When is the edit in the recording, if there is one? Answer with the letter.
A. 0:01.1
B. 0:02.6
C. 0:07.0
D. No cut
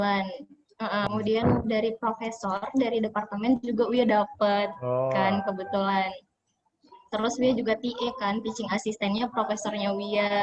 A